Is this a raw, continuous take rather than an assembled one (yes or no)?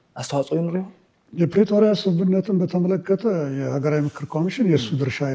yes